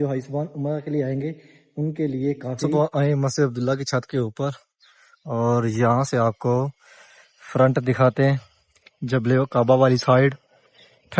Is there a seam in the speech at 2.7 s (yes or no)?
yes